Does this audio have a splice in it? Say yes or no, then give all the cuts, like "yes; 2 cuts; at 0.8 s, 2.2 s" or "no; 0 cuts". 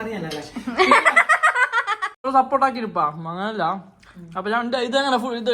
yes; 1 cut; at 2.3 s